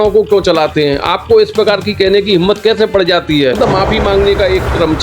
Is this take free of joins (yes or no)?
no